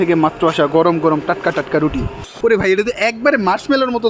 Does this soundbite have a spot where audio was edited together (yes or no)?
yes